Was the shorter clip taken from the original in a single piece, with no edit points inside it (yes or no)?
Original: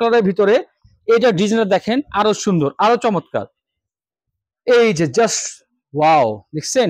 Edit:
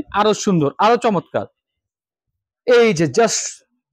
yes